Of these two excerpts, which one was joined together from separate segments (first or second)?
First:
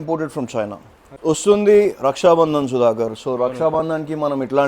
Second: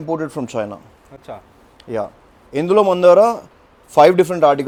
first